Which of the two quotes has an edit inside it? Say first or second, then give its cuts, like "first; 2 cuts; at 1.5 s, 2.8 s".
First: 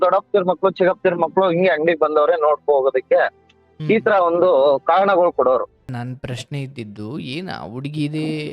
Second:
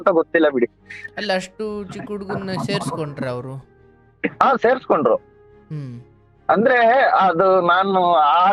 first; 1 cut; at 6.0 s